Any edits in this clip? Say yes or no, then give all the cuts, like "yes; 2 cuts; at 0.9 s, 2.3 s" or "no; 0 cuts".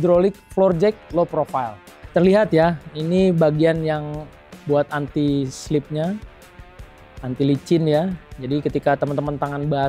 yes; 1 cut; at 2.0 s